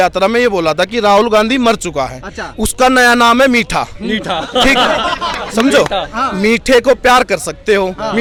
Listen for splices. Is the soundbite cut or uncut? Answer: uncut